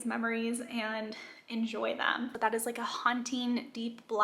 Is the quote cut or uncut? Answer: cut